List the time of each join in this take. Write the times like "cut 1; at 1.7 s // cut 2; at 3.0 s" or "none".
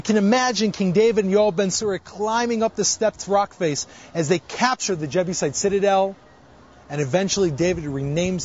cut 1; at 3.4 s